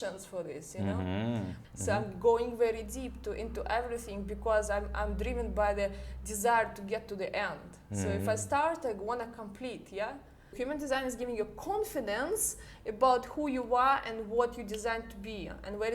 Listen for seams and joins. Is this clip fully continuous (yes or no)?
no